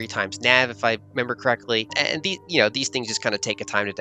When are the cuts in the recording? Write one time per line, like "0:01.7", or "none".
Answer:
0:02.0